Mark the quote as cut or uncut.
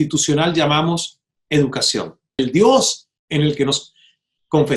cut